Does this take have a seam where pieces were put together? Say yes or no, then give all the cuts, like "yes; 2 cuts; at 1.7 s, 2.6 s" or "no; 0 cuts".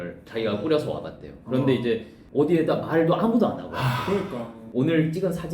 yes; 2 cuts; at 2.2 s, 4.6 s